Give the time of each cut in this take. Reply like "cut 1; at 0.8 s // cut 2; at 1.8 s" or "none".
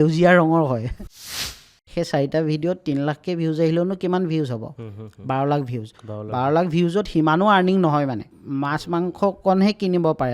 cut 1; at 1.3 s // cut 2; at 8.3 s